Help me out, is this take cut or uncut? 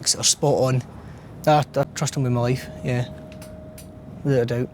uncut